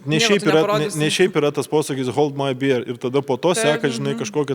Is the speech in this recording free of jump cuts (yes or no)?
yes